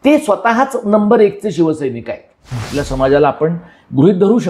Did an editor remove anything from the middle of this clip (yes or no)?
yes